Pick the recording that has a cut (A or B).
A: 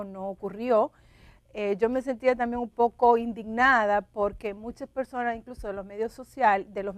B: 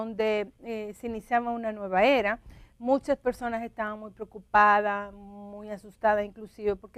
A